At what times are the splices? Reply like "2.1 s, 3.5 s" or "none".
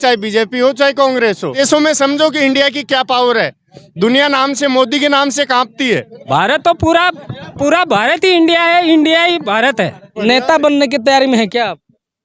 1.5 s, 6.1 s, 10.0 s